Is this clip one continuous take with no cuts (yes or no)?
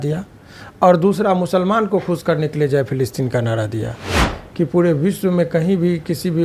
no